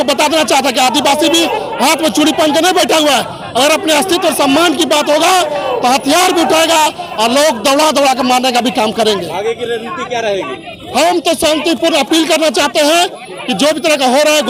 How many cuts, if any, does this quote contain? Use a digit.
0